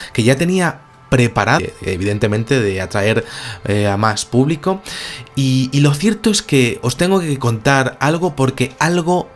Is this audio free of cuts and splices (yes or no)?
yes